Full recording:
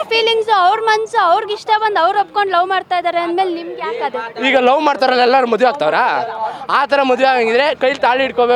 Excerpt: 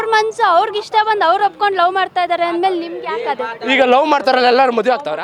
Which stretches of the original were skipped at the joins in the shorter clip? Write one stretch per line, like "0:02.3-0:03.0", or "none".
none